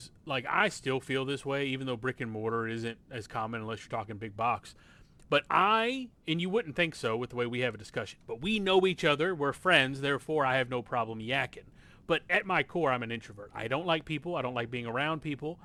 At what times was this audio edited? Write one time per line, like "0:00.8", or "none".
none